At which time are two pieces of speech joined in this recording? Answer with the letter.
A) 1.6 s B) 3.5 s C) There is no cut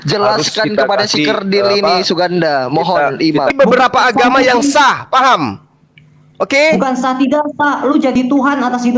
B